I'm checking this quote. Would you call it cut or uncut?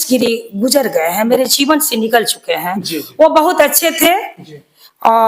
uncut